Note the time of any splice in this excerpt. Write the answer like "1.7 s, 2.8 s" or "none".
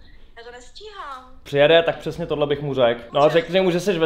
1.4 s, 3.1 s